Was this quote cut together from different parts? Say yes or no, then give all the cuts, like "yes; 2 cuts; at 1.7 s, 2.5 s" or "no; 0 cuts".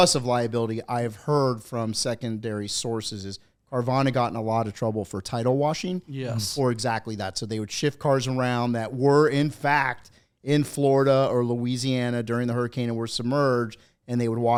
no; 0 cuts